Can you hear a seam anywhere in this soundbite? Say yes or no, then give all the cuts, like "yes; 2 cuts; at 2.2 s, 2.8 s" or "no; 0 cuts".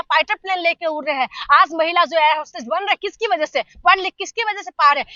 no; 0 cuts